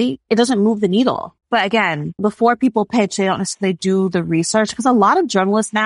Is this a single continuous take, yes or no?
no